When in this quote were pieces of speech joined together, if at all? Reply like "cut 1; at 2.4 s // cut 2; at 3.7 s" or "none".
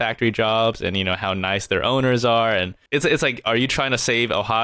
cut 1; at 2.8 s